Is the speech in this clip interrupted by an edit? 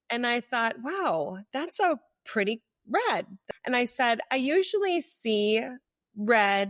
yes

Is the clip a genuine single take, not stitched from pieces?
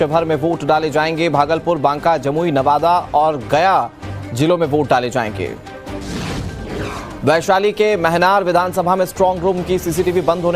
no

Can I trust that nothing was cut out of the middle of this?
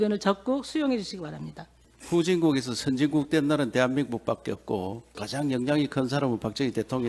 no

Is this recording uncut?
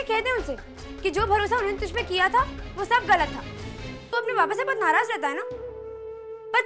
no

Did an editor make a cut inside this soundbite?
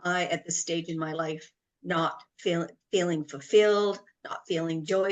no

